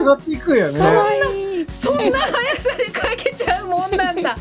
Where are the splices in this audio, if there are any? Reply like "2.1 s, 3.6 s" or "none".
none